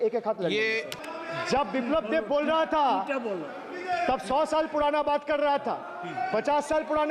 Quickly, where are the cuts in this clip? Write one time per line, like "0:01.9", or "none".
0:01.0